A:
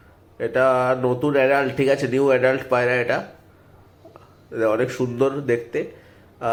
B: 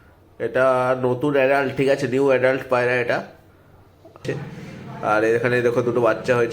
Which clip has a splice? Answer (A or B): B